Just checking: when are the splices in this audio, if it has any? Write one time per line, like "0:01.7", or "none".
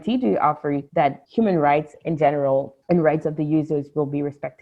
0:01.1
0:02.7